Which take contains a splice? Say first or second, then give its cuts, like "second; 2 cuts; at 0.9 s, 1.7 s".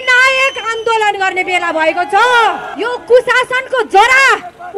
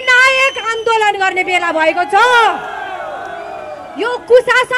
first; 1 cut; at 2.7 s